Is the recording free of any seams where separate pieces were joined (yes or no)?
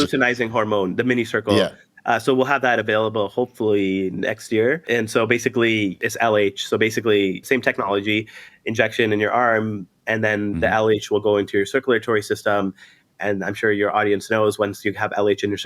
no